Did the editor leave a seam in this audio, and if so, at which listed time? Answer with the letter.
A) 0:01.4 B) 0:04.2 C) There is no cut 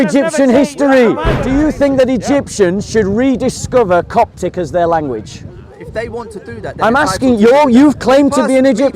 A